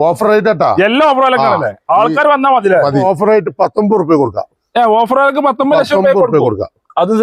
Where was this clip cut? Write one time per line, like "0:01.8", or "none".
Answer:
0:03.0